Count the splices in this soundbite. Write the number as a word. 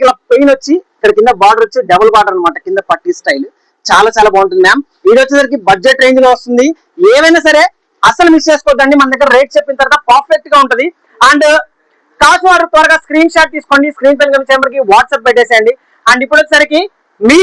zero